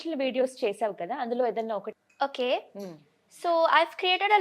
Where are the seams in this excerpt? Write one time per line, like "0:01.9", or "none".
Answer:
0:01.9